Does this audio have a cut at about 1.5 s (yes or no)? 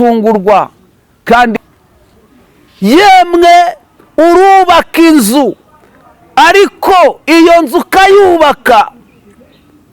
yes